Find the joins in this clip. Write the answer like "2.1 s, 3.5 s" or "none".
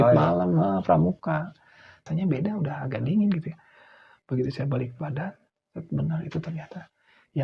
1.9 s